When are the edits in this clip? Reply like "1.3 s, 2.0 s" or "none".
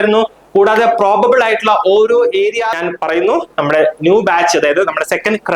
2.8 s